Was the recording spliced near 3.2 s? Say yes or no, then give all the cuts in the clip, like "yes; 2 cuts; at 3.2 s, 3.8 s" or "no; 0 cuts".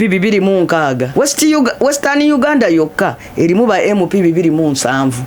no; 1 cut; at 1.1 s